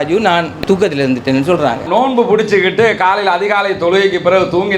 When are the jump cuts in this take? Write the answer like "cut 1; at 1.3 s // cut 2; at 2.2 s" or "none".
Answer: cut 1; at 1.9 s